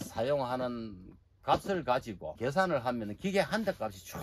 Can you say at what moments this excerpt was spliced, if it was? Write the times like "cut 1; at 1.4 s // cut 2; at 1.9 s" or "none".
cut 1; at 2.2 s